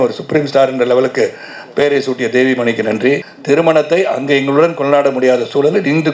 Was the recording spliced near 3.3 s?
yes; 1 cut; at 3.3 s

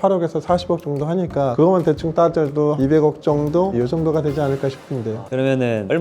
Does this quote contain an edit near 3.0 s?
no; 2 cuts; at 1.5 s, 5.2 s

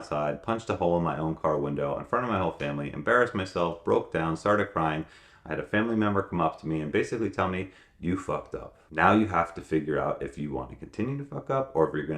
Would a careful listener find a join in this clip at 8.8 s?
yes; 1 cut; at 8.8 s

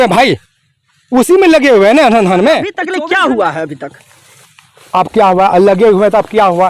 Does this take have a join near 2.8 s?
yes; 1 cut; at 2.8 s

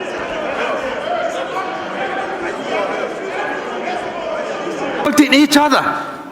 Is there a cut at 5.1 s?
yes; 1 cut; at 5.1 s

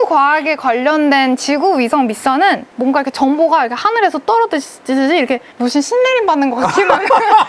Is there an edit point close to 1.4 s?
no; 2 cuts; at 2.6 s, 5.5 s

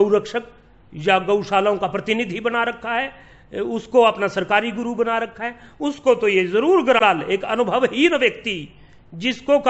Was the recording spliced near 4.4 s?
no; 1 cut; at 7.0 s

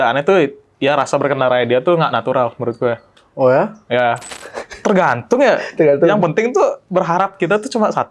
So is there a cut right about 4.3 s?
yes; 1 cut; at 4.3 s

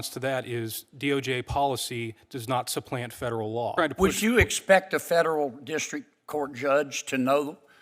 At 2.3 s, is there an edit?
no; 1 cut; at 3.7 s

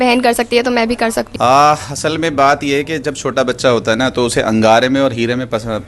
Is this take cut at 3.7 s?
no; 1 cut; at 1.3 s

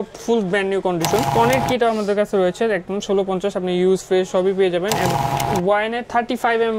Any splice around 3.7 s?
no; 2 cuts; at 1.3 s, 5.1 s

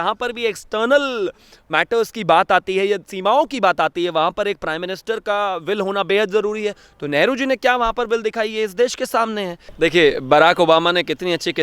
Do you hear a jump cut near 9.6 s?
yes; 1 cut; at 9.6 s

